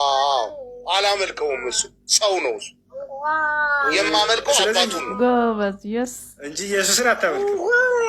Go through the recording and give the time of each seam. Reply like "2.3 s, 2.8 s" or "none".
none